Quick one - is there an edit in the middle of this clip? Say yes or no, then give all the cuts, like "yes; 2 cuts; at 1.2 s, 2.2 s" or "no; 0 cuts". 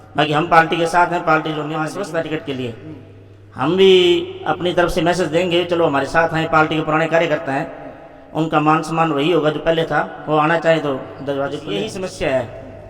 yes; 2 cuts; at 1.9 s, 11.9 s